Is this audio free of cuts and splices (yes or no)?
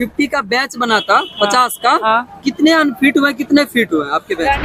yes